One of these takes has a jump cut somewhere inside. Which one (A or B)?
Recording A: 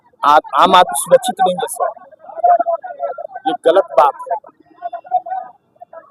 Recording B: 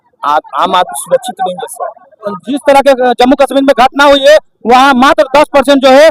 B